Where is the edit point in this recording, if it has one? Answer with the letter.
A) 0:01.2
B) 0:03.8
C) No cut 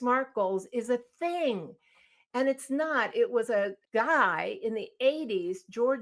B